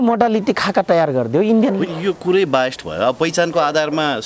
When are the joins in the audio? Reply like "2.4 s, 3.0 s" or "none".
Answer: none